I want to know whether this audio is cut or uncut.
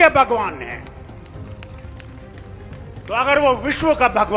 uncut